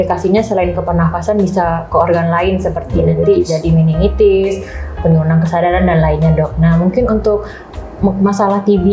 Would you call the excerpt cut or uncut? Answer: uncut